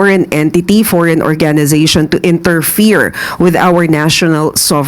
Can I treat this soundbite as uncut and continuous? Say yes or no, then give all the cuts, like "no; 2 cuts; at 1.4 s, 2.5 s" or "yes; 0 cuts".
yes; 0 cuts